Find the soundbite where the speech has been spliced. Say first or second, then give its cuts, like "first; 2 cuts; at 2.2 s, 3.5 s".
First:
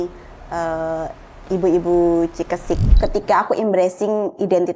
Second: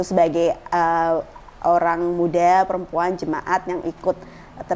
first; 1 cut; at 2.9 s